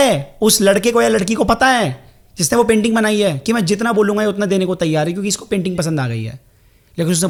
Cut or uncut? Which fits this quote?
uncut